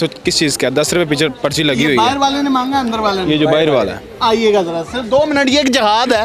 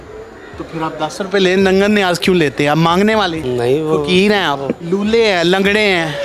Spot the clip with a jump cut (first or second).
second